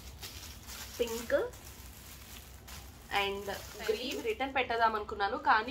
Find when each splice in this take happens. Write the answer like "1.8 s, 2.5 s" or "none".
4.0 s